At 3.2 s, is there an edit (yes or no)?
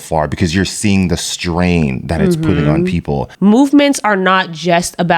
yes